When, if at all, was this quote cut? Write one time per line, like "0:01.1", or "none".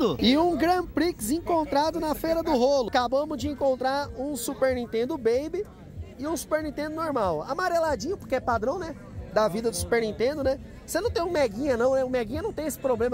0:02.9